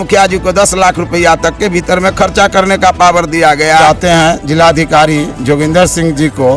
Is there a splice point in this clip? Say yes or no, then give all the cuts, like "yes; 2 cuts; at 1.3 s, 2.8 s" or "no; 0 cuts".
yes; 1 cut; at 3.8 s